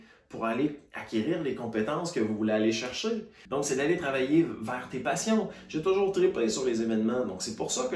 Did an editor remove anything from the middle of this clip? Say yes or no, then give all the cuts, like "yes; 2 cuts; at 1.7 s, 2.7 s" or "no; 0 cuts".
yes; 1 cut; at 3.5 s